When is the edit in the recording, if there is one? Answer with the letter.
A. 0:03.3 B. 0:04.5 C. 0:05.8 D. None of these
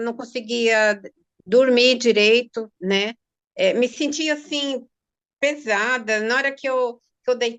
D